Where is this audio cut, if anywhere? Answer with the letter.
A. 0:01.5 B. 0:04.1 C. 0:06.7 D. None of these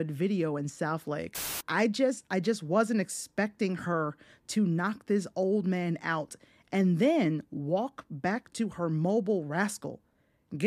A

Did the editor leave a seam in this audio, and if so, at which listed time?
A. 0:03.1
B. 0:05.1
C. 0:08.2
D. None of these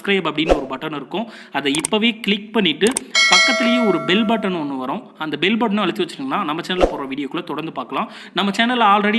D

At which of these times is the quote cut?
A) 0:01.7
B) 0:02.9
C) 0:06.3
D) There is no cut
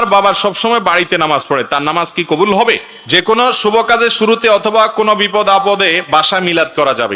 B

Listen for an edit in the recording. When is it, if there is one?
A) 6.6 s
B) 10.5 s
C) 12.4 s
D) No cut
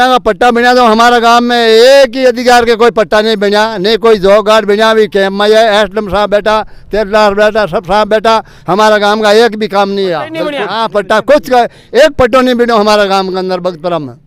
B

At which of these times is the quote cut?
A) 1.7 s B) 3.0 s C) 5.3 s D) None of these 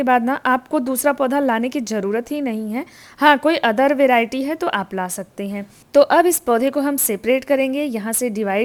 D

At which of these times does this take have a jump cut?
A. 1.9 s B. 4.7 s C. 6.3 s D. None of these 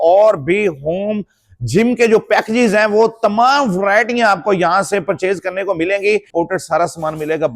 C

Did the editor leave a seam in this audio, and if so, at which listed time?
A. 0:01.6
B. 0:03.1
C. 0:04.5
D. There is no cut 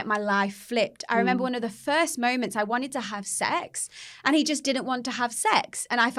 D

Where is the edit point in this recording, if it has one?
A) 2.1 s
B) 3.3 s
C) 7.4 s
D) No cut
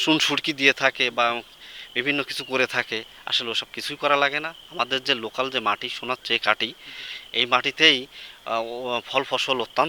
D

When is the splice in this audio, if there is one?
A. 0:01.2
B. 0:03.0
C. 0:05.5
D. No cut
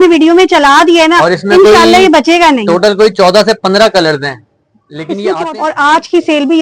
C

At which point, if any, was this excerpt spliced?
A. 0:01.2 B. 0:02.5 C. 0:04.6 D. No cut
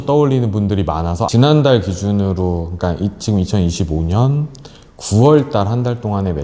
A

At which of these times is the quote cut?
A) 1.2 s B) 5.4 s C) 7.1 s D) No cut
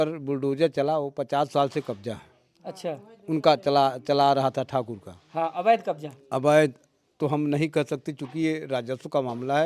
D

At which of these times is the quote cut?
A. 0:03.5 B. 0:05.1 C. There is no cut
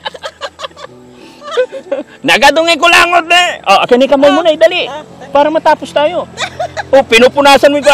C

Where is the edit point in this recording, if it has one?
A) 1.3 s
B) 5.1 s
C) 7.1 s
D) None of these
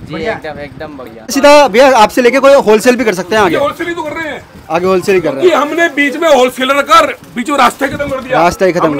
A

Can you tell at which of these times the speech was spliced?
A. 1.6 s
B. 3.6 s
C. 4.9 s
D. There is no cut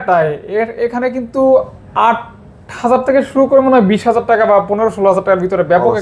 D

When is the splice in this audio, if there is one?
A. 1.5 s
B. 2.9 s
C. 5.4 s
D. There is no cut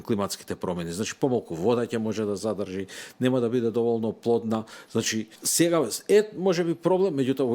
C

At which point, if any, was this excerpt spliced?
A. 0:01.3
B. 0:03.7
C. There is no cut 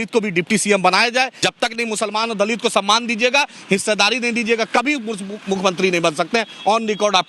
A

